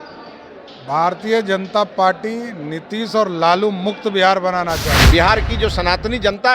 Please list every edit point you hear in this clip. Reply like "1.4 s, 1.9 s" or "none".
5.0 s